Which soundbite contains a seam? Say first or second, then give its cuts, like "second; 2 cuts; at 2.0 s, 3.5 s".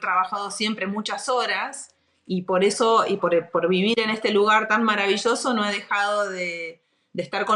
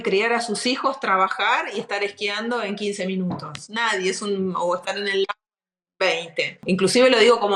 second; 1 cut; at 6.6 s